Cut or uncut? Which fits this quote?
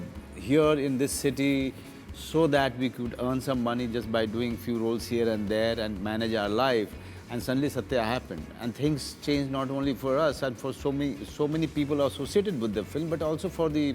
uncut